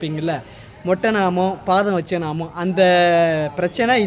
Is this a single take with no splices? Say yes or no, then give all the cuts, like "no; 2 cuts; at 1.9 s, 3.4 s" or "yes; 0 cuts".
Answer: yes; 0 cuts